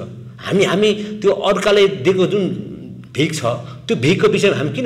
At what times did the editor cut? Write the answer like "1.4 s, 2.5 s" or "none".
none

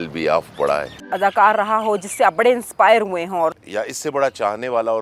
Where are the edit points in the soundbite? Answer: 1.1 s, 3.6 s

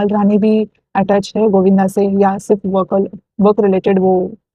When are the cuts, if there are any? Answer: none

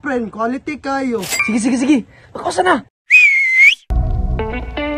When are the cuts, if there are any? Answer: 1.3 s, 2.9 s

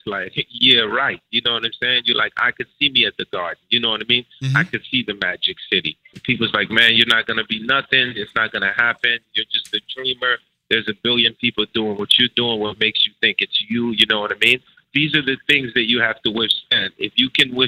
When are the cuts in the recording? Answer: 6.2 s, 14.8 s

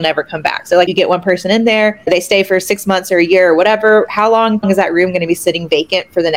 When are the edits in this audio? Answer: 0.9 s, 2.1 s, 4.6 s

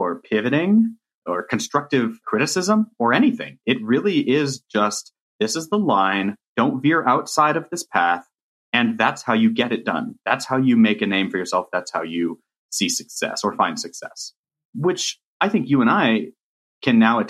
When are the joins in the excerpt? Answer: 1.2 s, 2.2 s, 6.5 s, 14.7 s

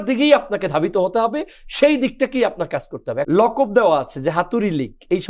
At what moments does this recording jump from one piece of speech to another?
3.2 s

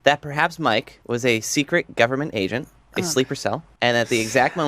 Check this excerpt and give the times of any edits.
0.9 s, 3.7 s

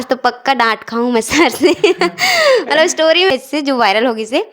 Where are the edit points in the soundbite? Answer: 3.3 s

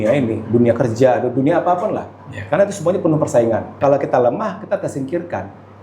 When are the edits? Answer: 3.7 s

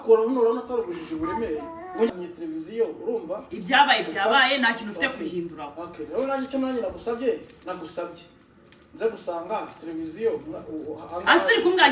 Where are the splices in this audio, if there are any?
2.1 s

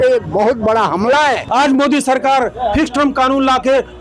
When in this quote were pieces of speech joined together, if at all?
1.4 s

